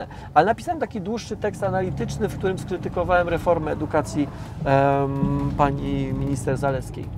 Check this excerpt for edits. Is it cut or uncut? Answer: uncut